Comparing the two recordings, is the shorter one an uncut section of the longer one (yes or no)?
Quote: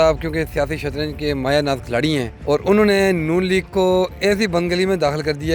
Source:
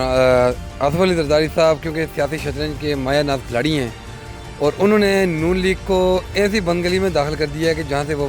no